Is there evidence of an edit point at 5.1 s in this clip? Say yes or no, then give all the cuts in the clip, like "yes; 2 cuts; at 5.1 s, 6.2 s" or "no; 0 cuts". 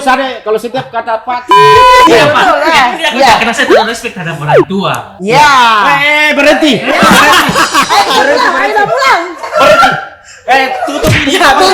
no; 0 cuts